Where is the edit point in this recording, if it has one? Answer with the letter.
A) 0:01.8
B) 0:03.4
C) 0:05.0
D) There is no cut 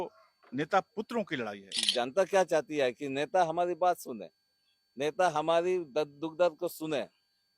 A